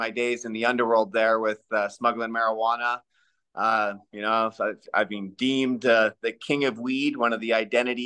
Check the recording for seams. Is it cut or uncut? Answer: uncut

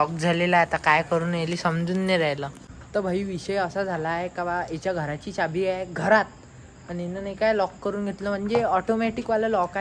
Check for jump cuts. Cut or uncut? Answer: uncut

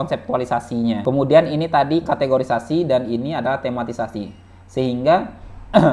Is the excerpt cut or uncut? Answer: cut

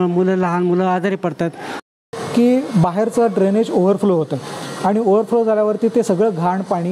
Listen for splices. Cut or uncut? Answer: uncut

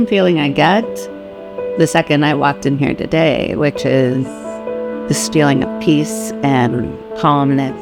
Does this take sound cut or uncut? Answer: uncut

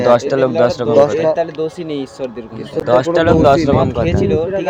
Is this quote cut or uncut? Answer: uncut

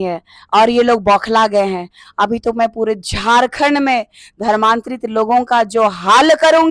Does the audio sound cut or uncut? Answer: uncut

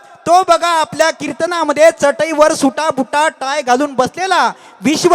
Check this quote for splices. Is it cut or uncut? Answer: uncut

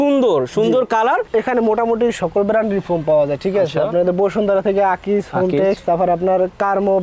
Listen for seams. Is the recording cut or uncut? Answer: cut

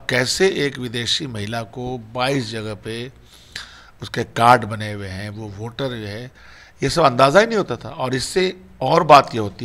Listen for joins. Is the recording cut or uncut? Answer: uncut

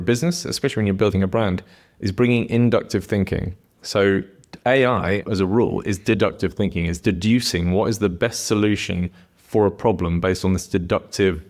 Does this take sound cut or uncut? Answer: cut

